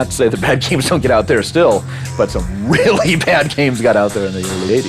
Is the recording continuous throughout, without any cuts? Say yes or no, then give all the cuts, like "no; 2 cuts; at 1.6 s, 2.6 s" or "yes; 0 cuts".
yes; 0 cuts